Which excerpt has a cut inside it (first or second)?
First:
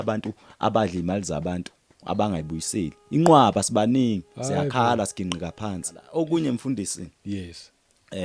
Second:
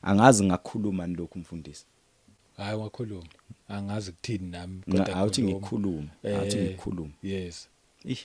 first